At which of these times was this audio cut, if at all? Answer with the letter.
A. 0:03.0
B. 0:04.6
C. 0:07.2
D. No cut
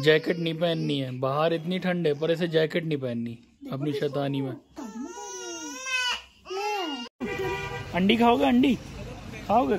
C